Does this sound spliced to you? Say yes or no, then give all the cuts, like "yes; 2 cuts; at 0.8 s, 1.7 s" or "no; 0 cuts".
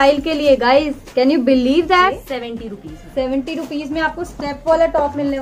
yes; 1 cut; at 2.3 s